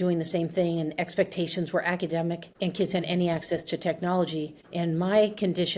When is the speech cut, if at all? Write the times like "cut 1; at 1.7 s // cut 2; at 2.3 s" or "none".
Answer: none